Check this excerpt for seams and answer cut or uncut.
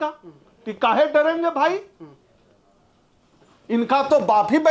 uncut